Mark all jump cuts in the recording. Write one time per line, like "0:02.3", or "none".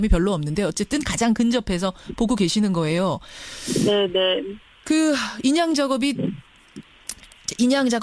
0:04.5

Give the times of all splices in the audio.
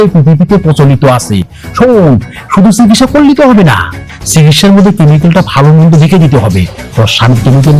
none

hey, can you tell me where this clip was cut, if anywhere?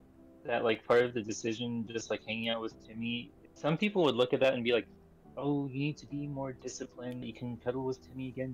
0:03.4
0:07.3

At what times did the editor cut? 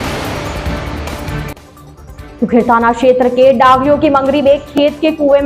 0:02.3

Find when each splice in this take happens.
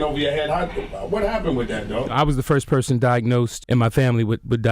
0:02.1

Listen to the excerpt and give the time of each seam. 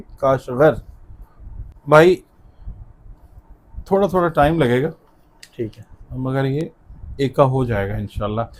none

